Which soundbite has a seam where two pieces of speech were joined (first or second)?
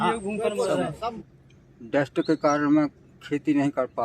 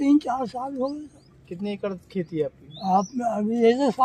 first